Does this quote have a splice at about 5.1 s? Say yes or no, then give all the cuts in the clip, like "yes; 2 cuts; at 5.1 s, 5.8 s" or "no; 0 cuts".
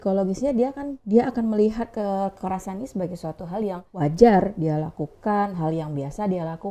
no; 2 cuts; at 0.9 s, 3.9 s